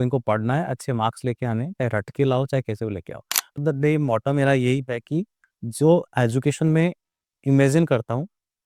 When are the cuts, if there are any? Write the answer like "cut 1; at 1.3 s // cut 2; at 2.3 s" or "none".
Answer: cut 1; at 3.6 s